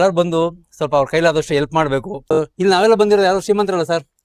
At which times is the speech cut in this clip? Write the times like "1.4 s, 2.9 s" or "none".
2.3 s